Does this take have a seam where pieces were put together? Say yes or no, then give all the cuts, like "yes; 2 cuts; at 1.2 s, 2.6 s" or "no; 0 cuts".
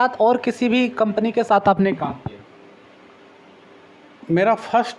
no; 0 cuts